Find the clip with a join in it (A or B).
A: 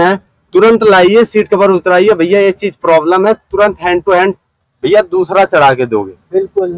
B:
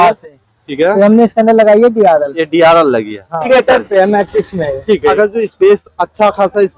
B